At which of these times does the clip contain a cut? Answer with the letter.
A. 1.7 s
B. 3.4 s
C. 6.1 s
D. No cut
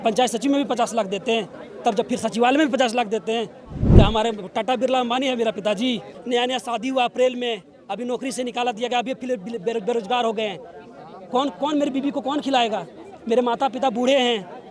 C